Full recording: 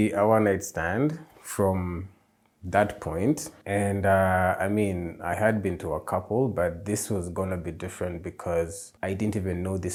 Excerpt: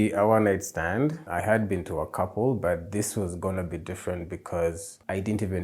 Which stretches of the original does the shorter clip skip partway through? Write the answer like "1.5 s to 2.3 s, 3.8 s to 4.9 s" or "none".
1.2 s to 5.2 s